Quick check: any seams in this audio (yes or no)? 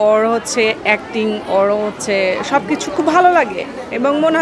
no